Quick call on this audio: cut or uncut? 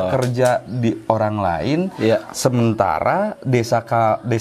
uncut